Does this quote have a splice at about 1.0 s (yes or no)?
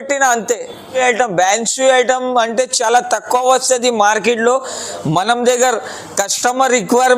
yes